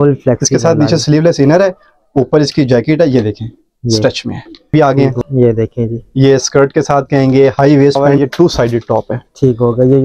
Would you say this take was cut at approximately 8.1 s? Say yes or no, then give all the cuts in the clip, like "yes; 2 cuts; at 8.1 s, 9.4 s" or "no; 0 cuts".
yes; 2 cuts; at 4.7 s, 8.1 s